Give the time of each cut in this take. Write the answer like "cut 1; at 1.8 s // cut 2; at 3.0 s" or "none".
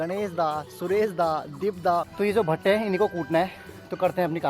cut 1; at 2.1 s